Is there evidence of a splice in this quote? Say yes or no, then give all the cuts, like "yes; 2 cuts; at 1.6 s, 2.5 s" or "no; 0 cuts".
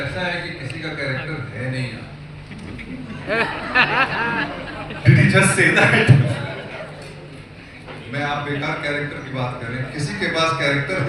no; 0 cuts